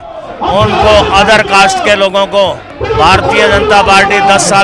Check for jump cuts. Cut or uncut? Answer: cut